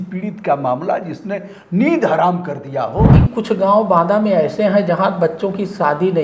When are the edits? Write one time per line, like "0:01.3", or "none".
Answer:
0:03.2